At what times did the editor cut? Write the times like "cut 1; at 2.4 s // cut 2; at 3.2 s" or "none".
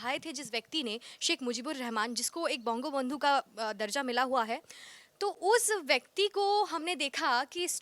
none